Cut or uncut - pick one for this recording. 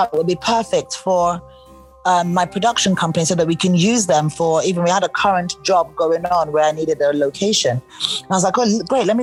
uncut